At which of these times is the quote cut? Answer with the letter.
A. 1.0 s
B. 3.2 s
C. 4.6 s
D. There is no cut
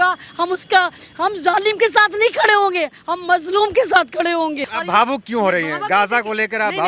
C